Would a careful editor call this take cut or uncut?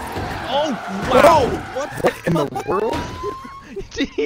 uncut